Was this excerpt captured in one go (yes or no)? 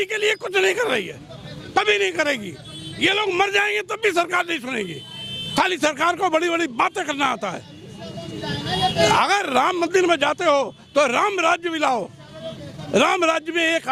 yes